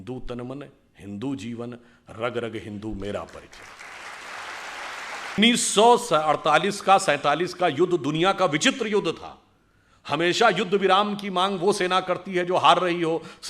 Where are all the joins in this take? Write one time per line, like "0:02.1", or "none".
0:05.4